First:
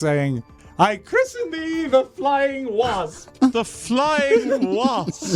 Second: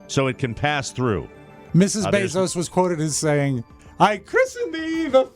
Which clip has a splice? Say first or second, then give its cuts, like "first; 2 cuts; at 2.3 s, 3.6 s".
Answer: second; 1 cut; at 1.6 s